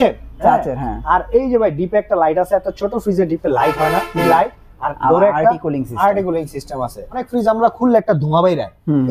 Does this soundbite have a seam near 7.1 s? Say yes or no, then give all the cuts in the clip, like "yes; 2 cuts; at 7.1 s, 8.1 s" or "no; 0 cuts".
no; 0 cuts